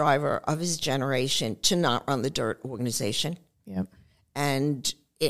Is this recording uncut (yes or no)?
yes